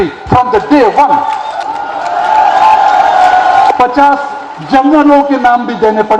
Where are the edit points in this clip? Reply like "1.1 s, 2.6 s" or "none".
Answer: 1.6 s, 3.7 s